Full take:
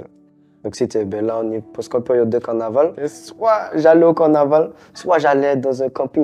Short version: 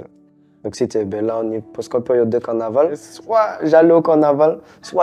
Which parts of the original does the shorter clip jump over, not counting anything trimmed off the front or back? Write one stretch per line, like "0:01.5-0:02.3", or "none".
0:03.1-0:03.2